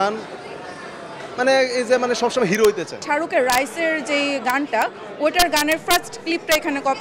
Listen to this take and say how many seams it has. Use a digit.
1